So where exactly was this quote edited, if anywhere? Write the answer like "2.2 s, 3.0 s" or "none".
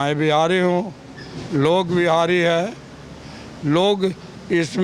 none